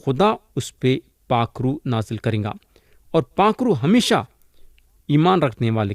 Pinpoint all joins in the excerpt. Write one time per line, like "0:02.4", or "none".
none